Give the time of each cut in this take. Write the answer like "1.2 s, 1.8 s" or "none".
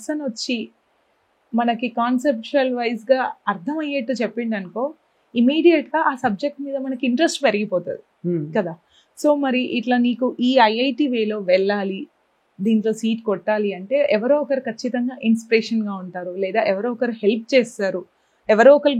none